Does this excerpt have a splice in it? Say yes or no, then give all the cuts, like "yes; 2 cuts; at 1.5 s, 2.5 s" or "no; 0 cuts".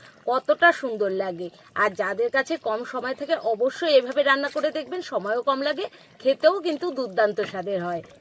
no; 0 cuts